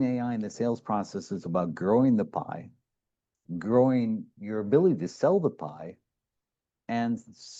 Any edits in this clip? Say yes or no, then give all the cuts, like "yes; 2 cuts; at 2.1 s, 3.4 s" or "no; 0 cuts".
no; 0 cuts